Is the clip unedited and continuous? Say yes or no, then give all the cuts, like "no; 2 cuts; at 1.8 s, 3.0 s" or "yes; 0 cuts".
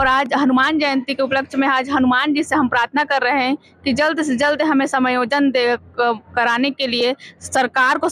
yes; 0 cuts